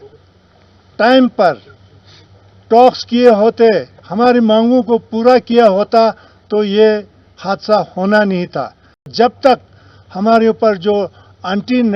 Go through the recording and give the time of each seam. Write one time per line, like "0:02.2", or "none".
0:09.1